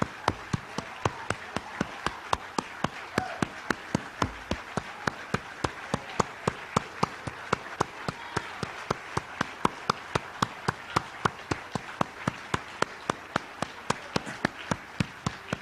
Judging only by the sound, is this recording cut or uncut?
uncut